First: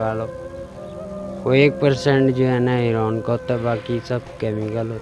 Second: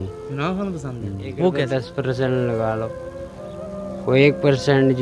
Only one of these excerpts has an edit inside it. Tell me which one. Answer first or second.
second